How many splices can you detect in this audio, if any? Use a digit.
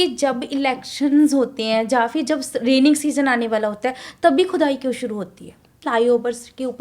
1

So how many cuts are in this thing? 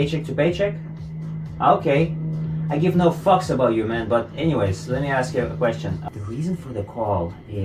1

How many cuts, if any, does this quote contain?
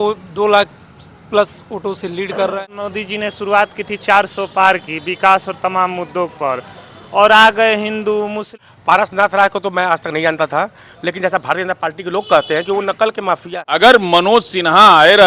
3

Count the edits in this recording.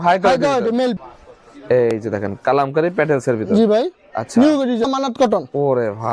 2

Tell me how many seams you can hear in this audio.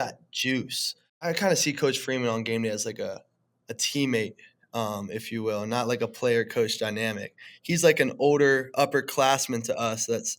1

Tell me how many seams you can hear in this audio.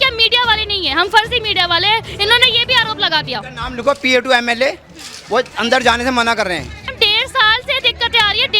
1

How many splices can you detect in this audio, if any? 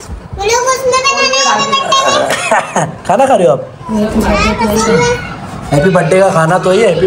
0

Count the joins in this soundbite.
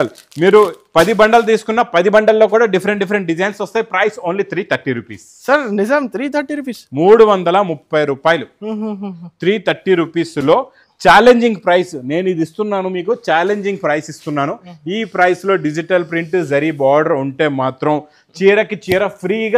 0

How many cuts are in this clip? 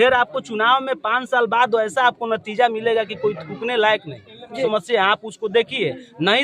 1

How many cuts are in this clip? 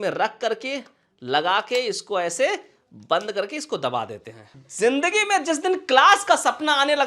1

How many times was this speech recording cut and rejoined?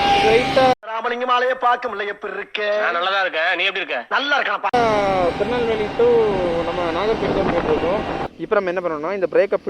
1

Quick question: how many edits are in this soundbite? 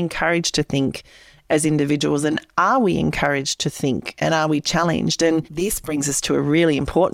1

